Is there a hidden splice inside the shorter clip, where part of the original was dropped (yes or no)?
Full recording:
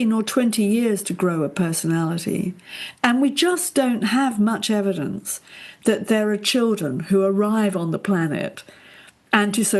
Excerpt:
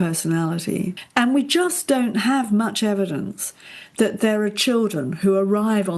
yes